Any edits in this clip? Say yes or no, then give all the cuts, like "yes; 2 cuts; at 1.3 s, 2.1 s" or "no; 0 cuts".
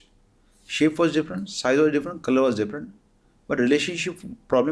no; 0 cuts